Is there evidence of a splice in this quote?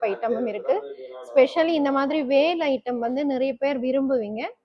no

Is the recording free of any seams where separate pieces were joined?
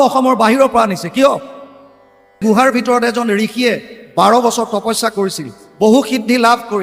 no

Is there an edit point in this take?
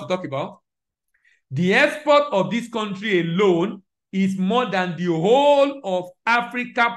no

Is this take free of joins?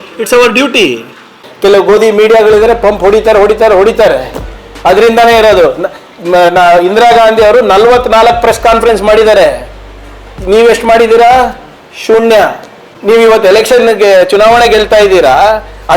no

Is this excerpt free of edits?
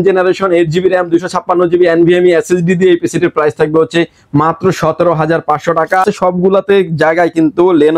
no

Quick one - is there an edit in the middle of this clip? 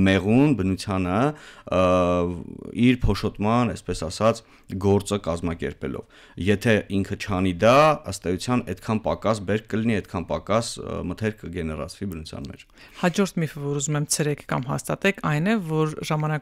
no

